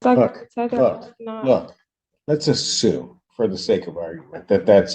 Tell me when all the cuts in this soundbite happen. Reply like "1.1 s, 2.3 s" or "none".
none